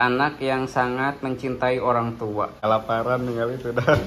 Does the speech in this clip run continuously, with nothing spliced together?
no; 1 cut; at 2.5 s

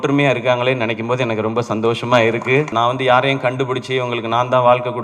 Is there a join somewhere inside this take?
yes; 1 cut; at 2.7 s

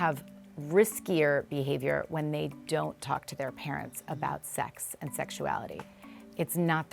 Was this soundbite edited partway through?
no; 0 cuts

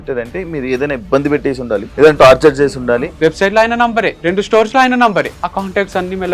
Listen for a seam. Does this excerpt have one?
yes; 4 cuts; at 1.9 s, 3.1 s, 4.1 s, 5.4 s

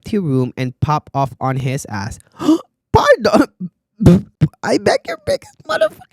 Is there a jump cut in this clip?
yes; 1 cut; at 4.3 s

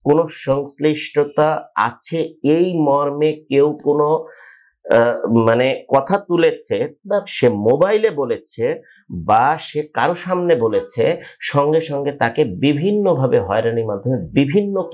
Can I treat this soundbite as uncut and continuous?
yes; 0 cuts

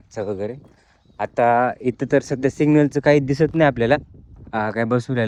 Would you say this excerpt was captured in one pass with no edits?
yes; 0 cuts

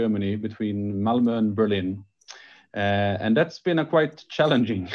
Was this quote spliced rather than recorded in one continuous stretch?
no; 0 cuts

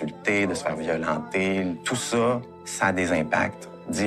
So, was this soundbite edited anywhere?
yes; 1 cut; at 1.8 s

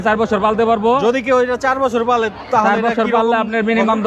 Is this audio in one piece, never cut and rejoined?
yes; 0 cuts

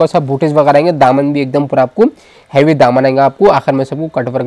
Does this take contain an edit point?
no; 0 cuts

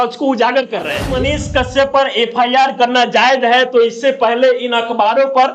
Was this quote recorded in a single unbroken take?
no; 1 cut; at 1.1 s

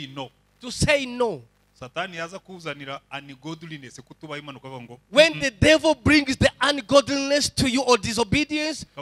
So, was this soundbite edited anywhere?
no; 0 cuts

